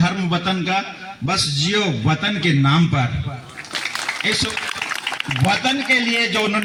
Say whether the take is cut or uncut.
uncut